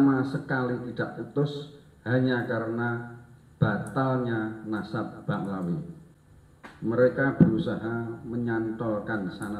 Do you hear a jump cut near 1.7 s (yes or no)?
no